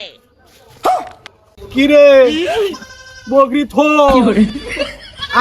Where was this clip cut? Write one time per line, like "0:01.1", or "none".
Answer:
none